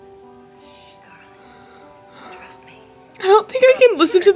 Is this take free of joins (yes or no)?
yes